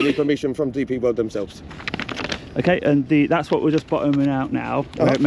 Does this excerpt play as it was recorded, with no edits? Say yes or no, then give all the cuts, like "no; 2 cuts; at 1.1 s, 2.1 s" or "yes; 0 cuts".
yes; 0 cuts